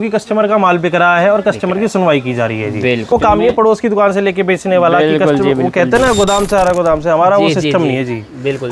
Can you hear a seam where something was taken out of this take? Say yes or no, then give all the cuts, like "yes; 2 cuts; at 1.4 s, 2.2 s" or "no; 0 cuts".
yes; 1 cut; at 3.1 s